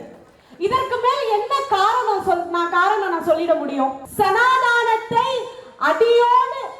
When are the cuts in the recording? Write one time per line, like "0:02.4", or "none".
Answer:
0:04.0

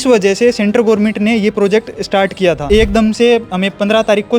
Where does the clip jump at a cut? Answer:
0:02.6

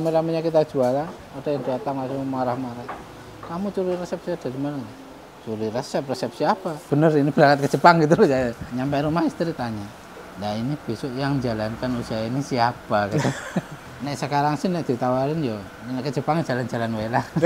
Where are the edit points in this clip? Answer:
0:06.7
0:08.6
0:13.8
0:15.7

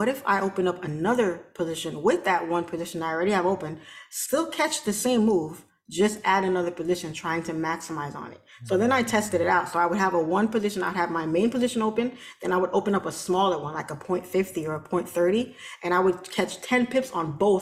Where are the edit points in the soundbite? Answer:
none

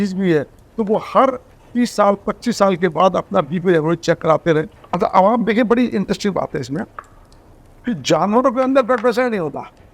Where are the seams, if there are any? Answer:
0:04.8

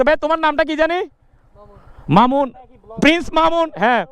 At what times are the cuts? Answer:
0:00.9

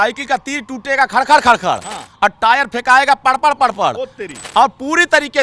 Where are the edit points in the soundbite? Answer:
none

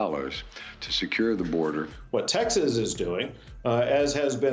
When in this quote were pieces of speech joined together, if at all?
none

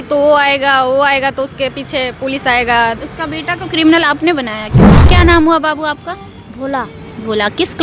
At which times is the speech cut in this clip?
0:05.0

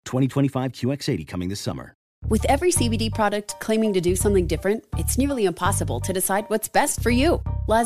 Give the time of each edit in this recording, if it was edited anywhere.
0:02.1

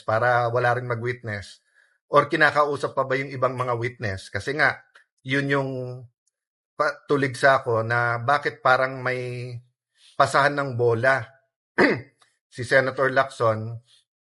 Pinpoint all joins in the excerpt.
none

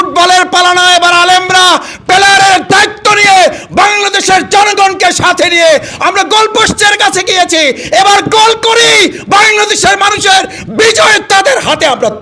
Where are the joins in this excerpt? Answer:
none

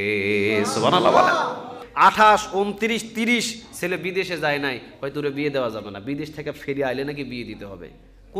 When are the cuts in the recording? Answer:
0:01.8

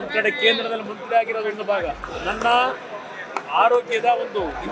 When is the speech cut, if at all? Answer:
0:02.1

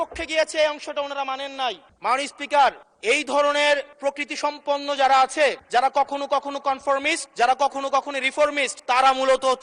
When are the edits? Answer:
0:01.9
0:02.9
0:03.9
0:05.6
0:07.2
0:08.7

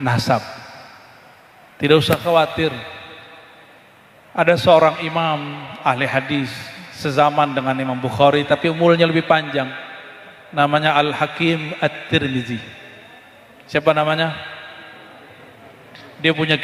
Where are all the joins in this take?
none

